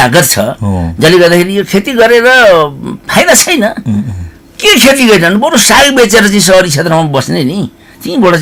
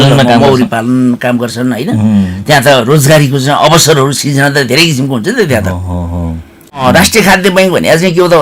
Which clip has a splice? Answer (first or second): second